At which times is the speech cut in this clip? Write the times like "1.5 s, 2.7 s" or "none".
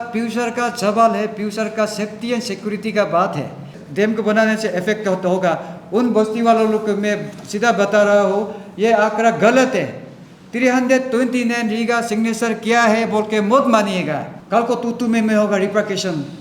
3.8 s, 14.3 s

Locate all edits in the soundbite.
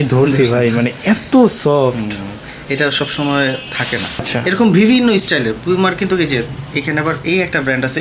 4.3 s

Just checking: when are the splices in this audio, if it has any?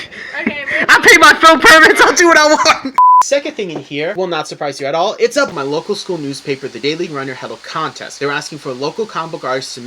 3.2 s, 5.6 s

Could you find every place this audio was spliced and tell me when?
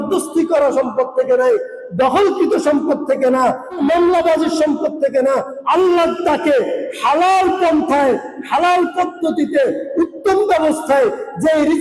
3.8 s, 5.5 s

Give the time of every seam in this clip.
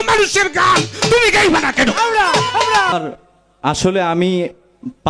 2.9 s

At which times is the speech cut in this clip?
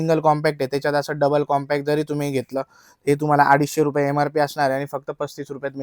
none

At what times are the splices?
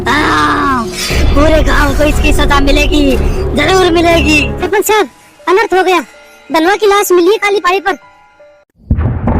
4.6 s

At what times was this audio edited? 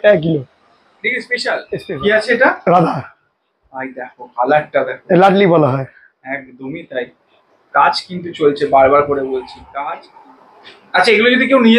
1.9 s, 10.1 s

